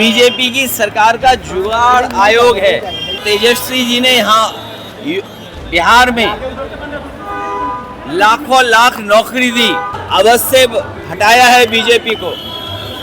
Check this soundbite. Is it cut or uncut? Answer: cut